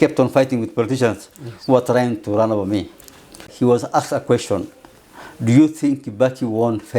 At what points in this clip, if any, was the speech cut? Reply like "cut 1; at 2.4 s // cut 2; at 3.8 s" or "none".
cut 1; at 3.5 s